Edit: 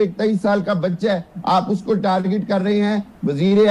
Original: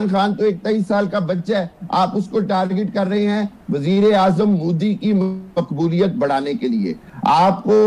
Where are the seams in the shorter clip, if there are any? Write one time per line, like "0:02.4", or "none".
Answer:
none